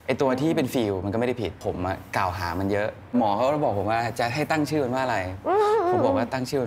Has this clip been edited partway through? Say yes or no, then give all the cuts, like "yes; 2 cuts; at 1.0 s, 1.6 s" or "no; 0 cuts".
yes; 2 cuts; at 1.6 s, 3.1 s